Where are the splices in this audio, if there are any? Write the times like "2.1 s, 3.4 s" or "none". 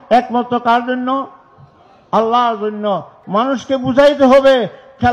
3.1 s

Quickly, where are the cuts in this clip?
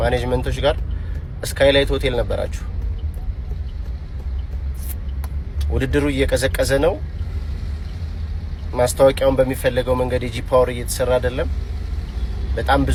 none

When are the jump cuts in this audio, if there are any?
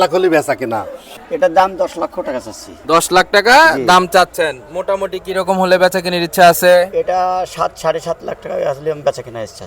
1.2 s

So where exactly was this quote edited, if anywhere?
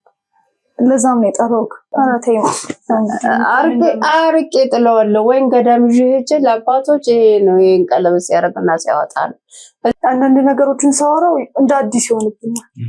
1.9 s, 10.1 s

